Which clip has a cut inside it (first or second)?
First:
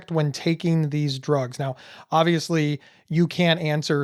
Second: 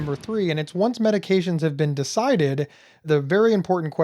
second